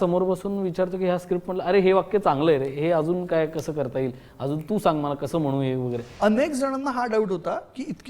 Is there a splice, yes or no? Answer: yes